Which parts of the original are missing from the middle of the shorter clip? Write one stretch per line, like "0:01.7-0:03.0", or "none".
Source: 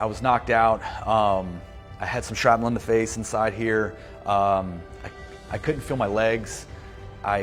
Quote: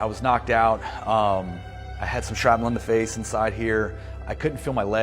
0:04.1-0:05.3